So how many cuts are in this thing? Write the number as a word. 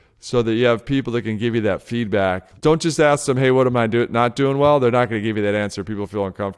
one